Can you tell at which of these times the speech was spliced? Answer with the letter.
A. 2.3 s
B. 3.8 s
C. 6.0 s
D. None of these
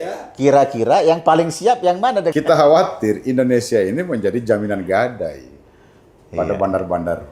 A